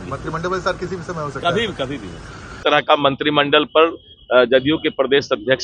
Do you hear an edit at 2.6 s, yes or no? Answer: yes